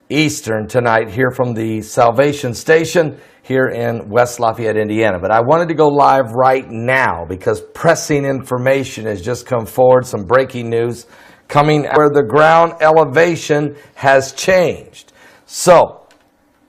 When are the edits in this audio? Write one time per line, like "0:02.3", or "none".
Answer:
none